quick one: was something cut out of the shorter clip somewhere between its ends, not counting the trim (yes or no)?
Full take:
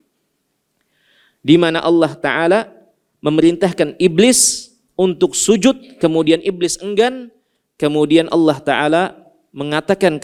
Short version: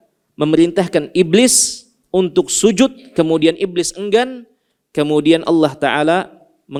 no